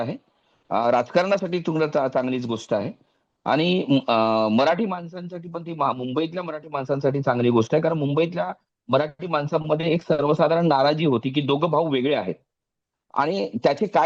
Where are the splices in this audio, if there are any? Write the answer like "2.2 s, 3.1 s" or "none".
none